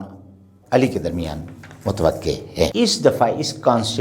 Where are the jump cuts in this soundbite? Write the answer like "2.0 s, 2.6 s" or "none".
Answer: 2.7 s